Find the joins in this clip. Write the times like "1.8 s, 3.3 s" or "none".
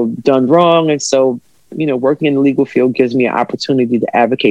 none

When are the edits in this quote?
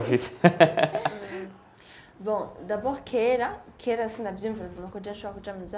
1.1 s

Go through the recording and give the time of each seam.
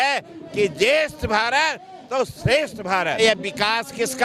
3.2 s

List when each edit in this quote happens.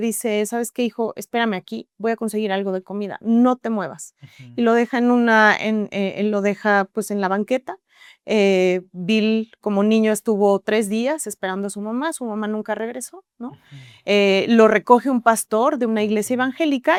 none

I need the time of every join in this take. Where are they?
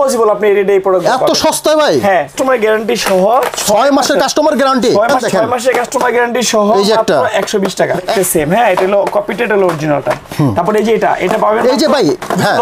2.3 s, 5.2 s, 8.1 s

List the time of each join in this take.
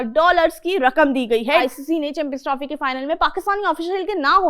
1.6 s

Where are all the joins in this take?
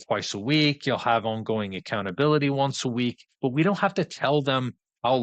3.3 s

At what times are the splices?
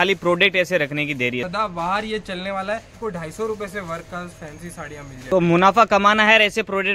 1.5 s, 3.0 s, 5.3 s

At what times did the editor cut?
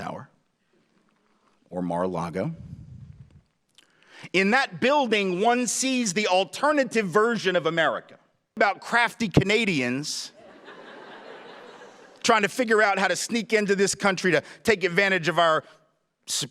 8.6 s

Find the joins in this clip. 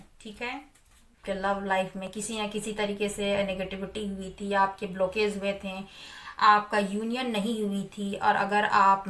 1.2 s

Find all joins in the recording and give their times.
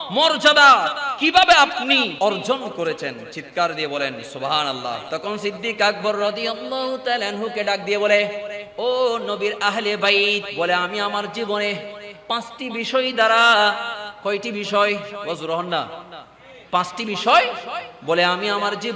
2.1 s, 5.0 s, 10.5 s, 15.2 s

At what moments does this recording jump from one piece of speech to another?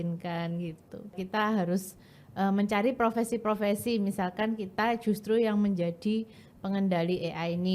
1.2 s

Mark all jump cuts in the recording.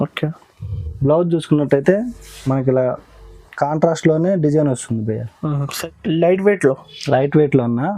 5.7 s

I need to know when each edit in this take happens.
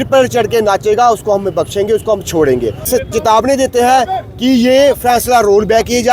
2.9 s

